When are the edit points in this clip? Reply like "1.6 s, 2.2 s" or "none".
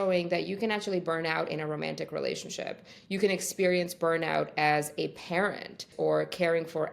5.9 s

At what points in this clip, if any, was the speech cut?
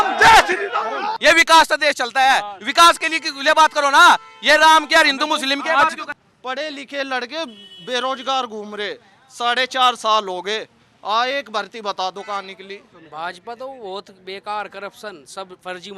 1.1 s, 6.1 s, 12.9 s

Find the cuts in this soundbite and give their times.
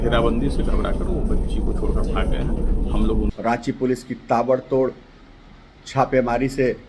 3.3 s

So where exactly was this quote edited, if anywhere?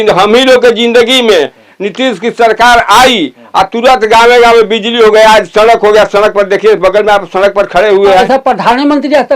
8.2 s

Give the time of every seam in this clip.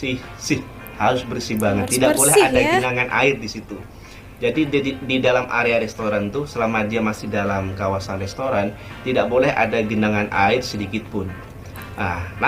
none

